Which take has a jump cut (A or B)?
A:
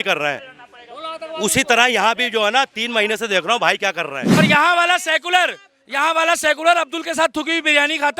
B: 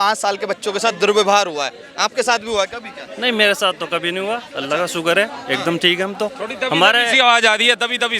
A